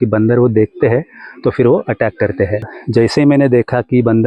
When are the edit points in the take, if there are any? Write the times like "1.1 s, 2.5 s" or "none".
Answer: 2.8 s